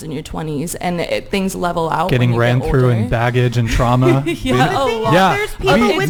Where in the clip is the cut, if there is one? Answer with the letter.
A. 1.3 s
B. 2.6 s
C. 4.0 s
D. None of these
D